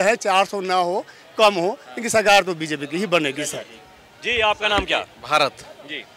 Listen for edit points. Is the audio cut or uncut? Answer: uncut